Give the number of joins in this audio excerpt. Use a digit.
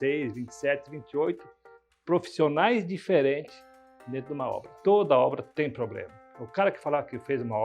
1